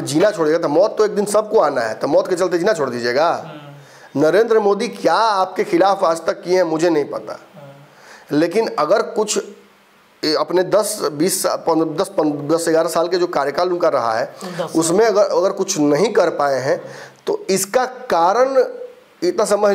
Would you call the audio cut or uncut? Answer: uncut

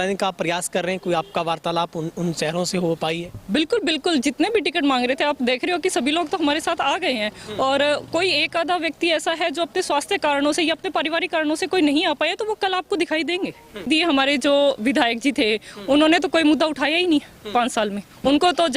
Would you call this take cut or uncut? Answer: cut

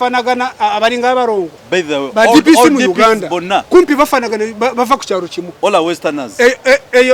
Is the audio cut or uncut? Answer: cut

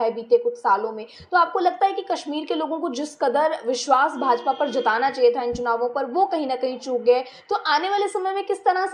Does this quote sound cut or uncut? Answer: uncut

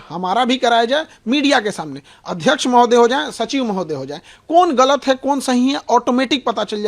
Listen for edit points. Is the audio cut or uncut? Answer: uncut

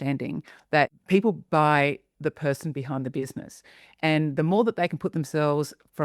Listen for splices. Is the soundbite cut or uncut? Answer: cut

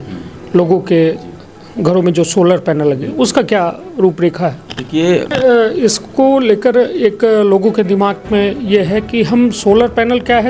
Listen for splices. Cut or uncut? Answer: cut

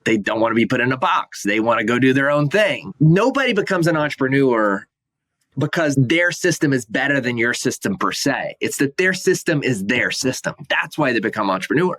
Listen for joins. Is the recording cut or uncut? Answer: cut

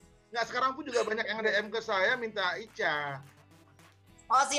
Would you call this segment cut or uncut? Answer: uncut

